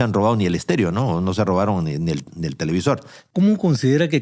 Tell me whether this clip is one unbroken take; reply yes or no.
no